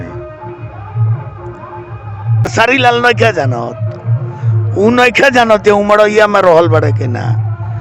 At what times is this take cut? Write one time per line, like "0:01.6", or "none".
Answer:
0:02.5